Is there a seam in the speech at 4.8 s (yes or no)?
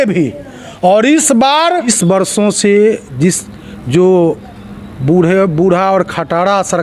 no